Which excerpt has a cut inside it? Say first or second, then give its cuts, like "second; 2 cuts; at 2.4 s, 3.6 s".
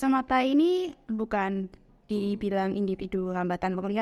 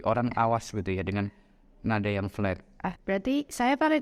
second; 1 cut; at 3.0 s